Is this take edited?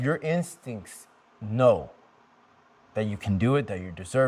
no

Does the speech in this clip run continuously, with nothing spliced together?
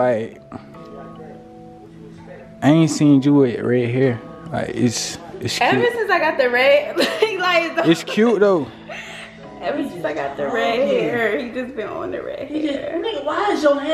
yes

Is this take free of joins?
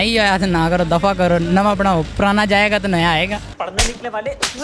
yes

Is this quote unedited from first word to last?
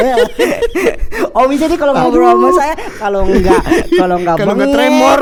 yes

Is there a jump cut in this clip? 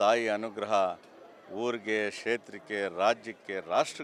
no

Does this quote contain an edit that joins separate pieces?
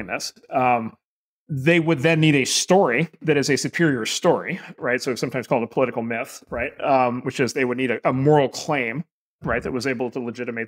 yes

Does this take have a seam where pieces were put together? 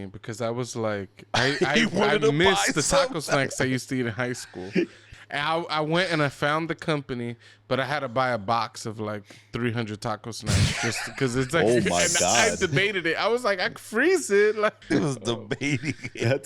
yes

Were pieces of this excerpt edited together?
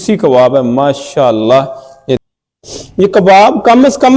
yes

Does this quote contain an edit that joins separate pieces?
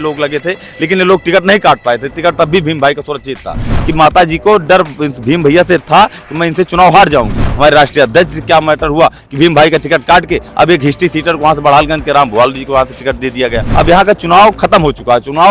yes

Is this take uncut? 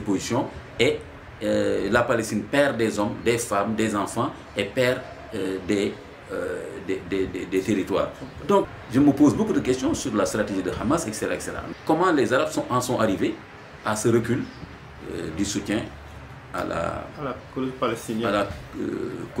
no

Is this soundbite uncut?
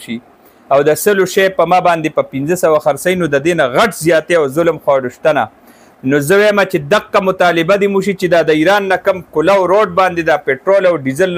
yes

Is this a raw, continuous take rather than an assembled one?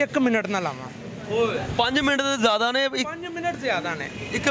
yes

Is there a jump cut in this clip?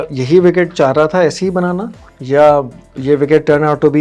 no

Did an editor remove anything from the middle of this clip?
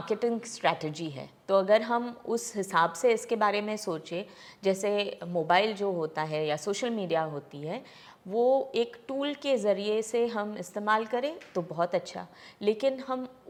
no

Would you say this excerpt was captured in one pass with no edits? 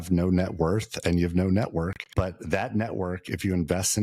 no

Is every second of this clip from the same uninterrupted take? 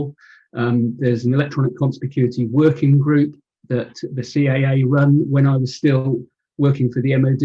no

